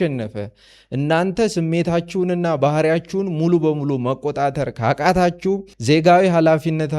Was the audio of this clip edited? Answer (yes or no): yes